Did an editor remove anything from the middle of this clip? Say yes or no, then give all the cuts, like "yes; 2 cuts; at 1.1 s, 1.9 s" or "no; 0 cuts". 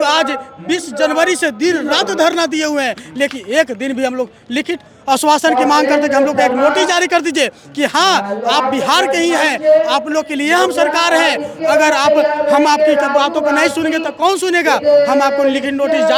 no; 0 cuts